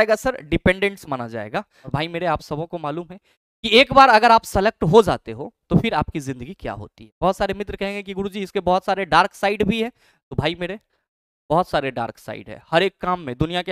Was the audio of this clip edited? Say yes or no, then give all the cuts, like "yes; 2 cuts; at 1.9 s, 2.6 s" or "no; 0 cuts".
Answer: yes; 1 cut; at 1.8 s